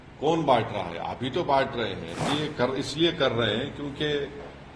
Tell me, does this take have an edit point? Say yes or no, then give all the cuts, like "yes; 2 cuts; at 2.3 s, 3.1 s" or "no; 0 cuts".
yes; 1 cut; at 2.3 s